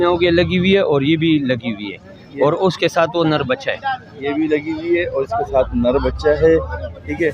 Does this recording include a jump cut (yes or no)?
no